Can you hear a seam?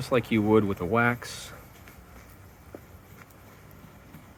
no; 0 cuts

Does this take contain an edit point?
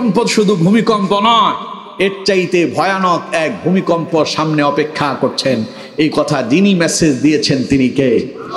no; 0 cuts

